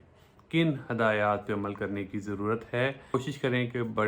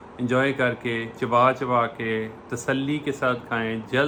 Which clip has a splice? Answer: first; 1 cut; at 3.1 s

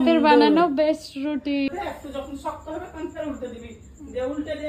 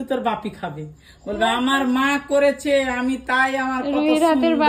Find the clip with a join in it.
first; 1 cut; at 1.7 s

